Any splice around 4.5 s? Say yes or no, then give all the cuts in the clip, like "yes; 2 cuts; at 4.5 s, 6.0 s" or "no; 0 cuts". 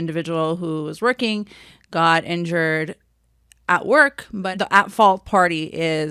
yes; 1 cut; at 4.5 s